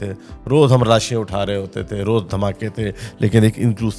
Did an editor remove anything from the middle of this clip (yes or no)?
no